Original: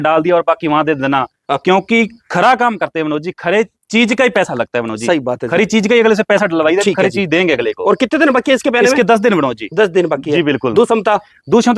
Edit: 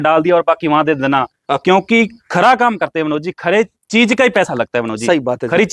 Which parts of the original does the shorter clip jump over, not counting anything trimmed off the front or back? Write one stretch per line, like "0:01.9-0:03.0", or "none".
none

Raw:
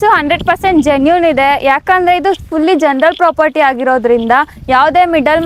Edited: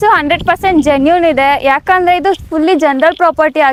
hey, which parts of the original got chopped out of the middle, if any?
none

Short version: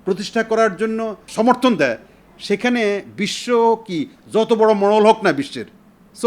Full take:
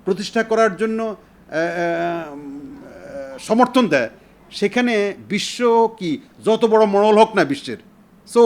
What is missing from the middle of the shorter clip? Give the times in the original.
0:01.2-0:03.3

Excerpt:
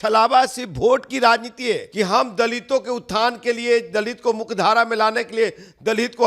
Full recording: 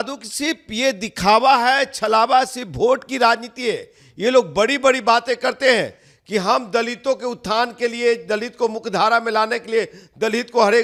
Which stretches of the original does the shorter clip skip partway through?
0:03.8-0:06.2

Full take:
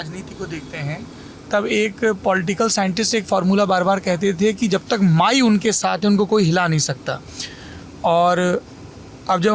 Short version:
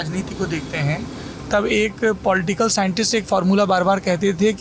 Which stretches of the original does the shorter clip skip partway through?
none

